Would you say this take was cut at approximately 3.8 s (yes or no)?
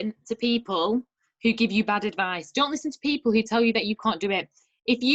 no